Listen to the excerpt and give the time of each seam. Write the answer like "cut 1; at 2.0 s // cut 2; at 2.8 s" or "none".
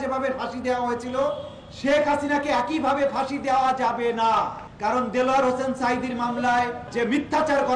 cut 1; at 4.6 s // cut 2; at 6.8 s